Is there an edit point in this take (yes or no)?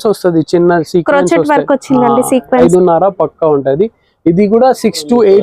yes